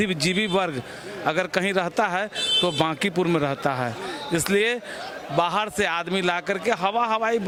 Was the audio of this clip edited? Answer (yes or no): no